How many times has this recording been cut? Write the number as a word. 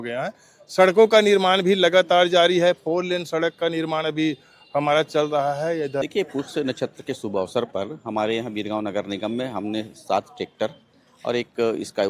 one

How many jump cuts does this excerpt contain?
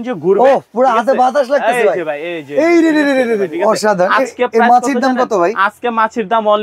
one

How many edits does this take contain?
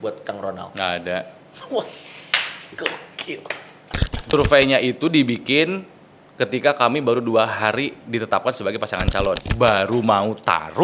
two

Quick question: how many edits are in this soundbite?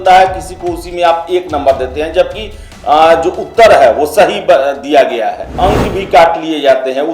one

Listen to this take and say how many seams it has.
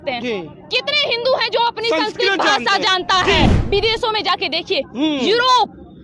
one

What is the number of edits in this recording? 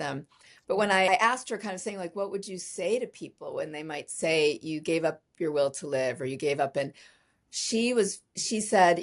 one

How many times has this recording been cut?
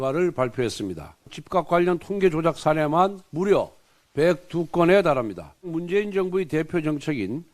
two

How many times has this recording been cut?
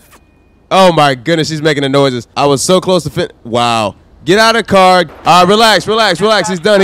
two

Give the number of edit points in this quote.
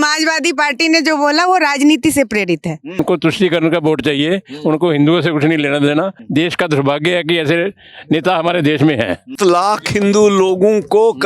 three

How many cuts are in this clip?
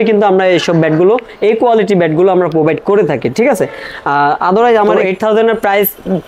one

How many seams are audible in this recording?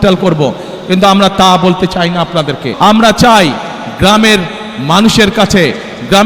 one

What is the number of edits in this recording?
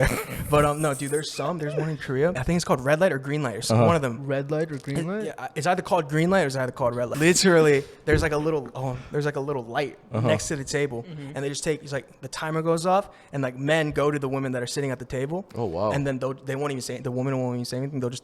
two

